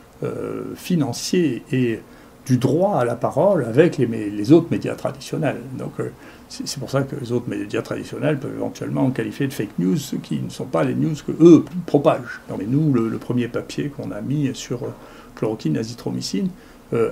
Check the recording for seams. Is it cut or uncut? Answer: cut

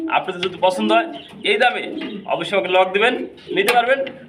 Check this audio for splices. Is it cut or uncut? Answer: uncut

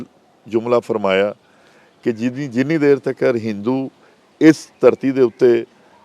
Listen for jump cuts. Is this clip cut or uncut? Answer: uncut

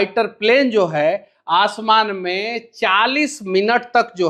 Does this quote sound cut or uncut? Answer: uncut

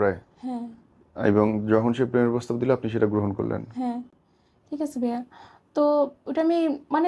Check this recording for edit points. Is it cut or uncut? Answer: uncut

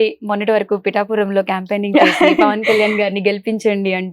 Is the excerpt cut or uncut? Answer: uncut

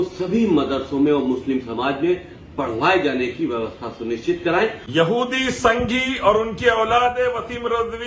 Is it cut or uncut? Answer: cut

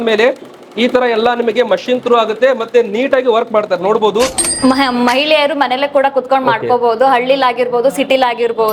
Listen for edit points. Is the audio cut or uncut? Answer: cut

